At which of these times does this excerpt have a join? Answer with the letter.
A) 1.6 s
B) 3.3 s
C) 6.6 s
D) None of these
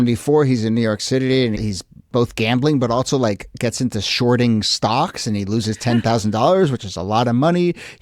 A